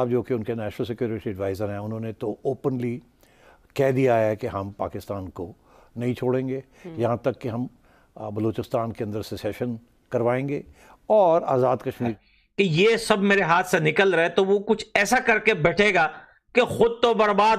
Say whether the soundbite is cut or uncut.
cut